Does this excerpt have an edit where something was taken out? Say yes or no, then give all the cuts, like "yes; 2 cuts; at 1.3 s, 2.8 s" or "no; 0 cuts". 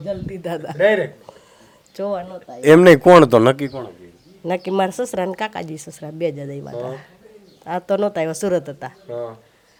no; 0 cuts